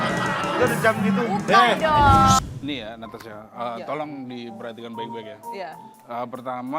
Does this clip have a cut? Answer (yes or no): yes